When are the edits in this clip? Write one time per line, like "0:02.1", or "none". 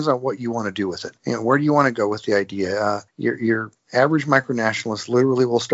0:01.1
0:03.1